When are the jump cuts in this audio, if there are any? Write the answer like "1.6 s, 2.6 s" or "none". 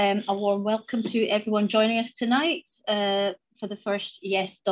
none